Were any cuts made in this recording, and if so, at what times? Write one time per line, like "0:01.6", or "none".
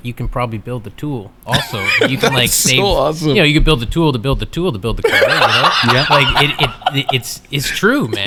none